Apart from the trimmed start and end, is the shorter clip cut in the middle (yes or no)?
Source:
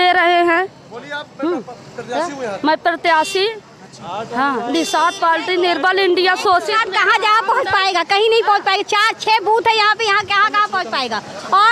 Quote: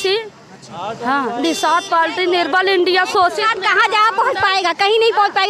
no